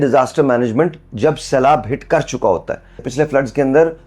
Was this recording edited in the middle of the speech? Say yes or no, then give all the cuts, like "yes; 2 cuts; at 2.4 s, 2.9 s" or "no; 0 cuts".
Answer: yes; 1 cut; at 3.1 s